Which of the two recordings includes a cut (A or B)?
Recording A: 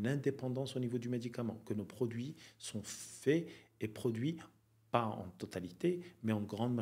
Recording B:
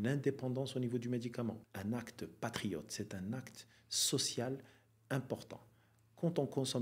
B